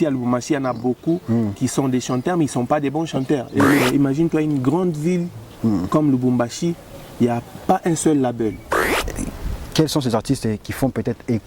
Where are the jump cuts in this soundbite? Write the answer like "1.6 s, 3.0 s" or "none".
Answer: 3.8 s, 8.9 s